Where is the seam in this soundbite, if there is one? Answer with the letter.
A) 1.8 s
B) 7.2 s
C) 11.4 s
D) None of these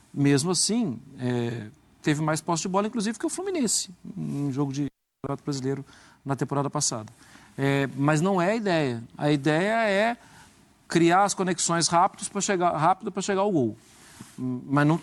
D